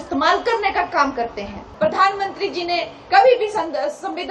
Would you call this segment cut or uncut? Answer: cut